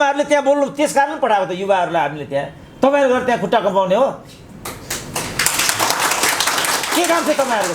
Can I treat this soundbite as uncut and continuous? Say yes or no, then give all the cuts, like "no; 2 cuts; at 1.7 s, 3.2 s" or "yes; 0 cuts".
yes; 0 cuts